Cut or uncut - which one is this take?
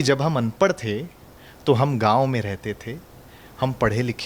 uncut